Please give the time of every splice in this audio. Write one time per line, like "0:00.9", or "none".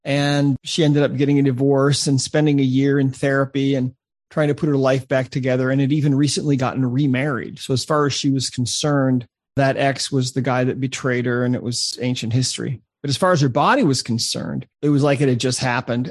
0:11.9